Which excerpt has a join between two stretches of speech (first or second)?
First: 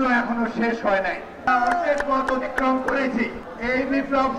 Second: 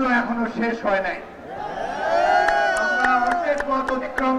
first